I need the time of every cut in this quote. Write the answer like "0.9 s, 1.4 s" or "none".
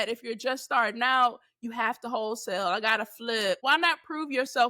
3.6 s